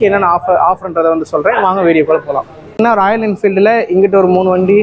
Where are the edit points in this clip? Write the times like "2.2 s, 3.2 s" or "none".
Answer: 2.7 s